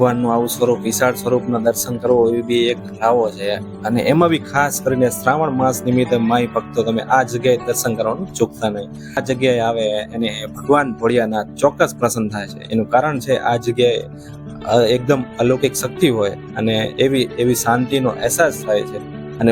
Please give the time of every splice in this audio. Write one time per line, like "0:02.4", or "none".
0:09.2

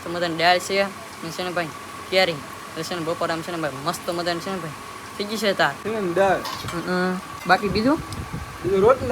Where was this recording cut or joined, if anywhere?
0:05.8
0:07.3

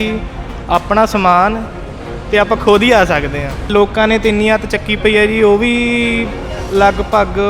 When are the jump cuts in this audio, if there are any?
0:03.7

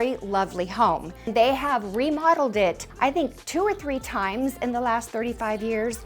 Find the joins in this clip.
0:01.3
0:02.9

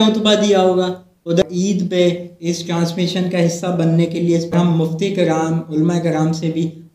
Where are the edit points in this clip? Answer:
0:01.4
0:04.5

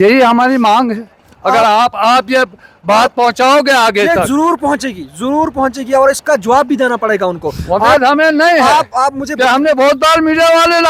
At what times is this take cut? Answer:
none

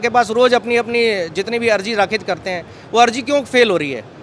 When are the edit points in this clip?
none

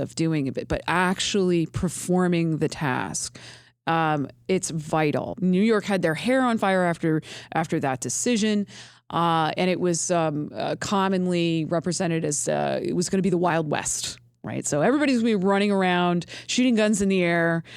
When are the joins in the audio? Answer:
0:05.3

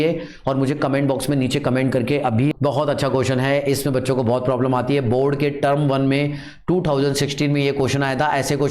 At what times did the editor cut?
0:02.5

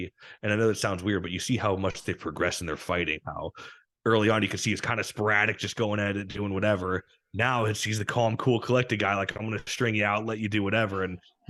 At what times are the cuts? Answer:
none

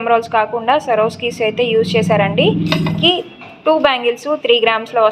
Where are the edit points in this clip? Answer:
0:03.0

